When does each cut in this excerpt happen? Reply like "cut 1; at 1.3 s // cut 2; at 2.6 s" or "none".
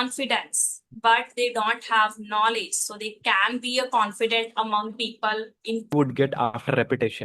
cut 1; at 5.9 s